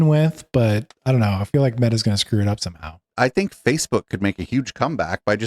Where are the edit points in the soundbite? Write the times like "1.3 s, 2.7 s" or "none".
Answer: 3.0 s